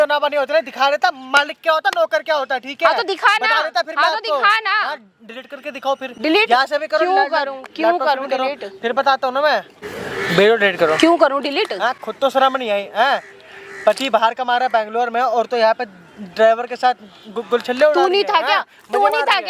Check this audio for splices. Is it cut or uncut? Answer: uncut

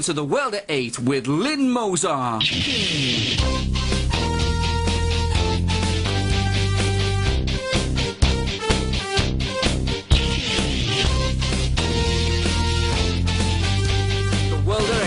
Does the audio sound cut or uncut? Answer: uncut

